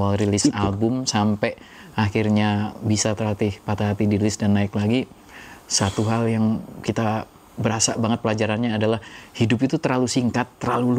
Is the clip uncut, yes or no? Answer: yes